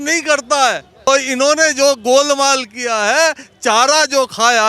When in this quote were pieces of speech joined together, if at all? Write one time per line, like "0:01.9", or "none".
0:01.1